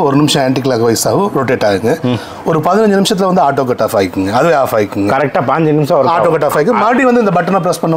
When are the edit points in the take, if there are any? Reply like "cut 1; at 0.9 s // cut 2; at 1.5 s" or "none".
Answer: none